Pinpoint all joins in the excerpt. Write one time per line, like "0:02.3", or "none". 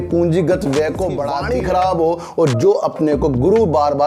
0:01.3